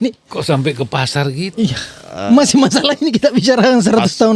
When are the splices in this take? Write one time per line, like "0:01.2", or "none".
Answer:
none